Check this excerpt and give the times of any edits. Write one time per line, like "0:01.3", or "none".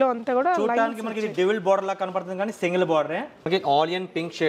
0:03.5